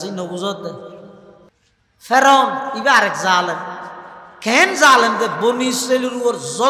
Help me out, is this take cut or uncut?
cut